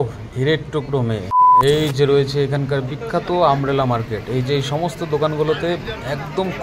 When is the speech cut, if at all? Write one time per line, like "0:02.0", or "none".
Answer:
0:01.4